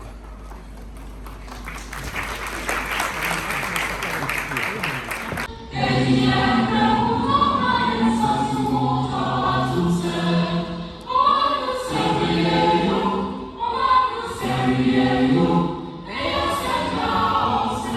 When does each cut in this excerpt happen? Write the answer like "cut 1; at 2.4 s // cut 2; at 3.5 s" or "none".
none